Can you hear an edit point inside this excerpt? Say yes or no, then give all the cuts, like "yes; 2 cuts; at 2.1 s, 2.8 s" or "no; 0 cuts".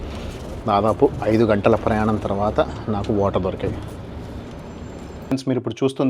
yes; 1 cut; at 5.1 s